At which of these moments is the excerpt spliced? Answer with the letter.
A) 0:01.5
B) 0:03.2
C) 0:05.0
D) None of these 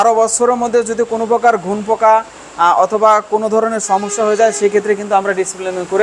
D